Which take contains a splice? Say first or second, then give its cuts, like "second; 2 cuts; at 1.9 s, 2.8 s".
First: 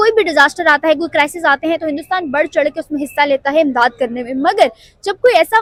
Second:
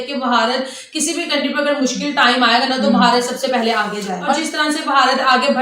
second; 1 cut; at 4.3 s